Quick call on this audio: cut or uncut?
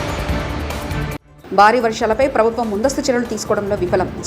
cut